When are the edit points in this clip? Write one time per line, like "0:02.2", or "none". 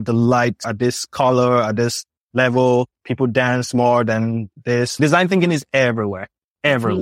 0:03.0
0:04.5